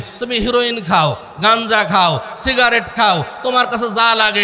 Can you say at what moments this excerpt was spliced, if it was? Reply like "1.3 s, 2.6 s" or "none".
none

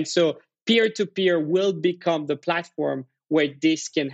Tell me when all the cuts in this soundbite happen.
none

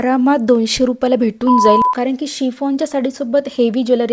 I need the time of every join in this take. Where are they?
1.8 s

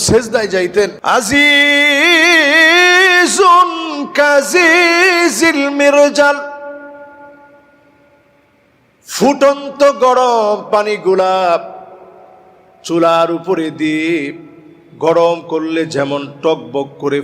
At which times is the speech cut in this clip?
1.0 s

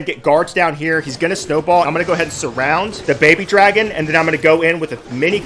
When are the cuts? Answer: none

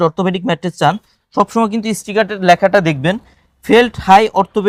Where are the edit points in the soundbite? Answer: none

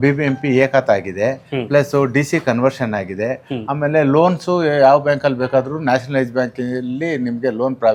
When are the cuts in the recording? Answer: none

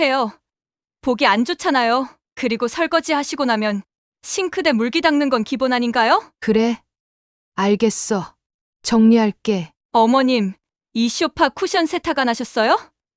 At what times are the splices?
6.3 s, 9.7 s

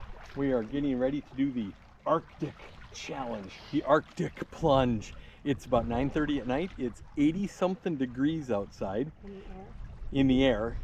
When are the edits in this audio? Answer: none

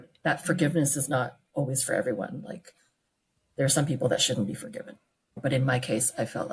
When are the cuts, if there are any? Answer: 5.4 s

